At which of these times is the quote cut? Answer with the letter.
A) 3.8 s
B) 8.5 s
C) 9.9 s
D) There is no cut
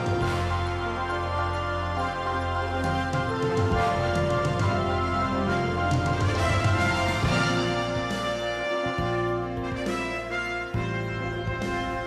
A